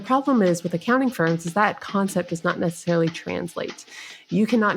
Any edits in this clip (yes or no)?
no